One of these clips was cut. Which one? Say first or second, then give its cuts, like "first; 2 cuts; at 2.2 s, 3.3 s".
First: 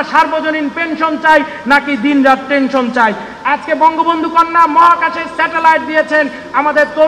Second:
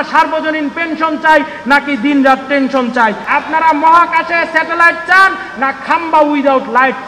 second; 1 cut; at 3.2 s